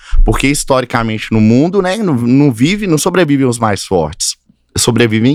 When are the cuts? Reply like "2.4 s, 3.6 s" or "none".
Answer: none